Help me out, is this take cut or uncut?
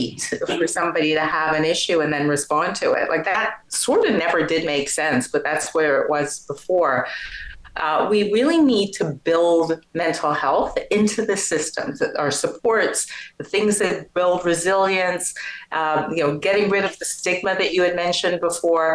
uncut